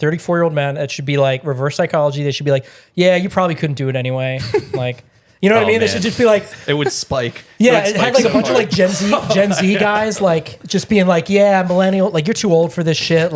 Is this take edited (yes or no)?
no